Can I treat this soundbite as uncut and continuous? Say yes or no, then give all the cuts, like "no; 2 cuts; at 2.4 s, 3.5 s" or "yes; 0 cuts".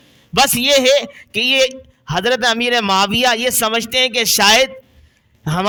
yes; 0 cuts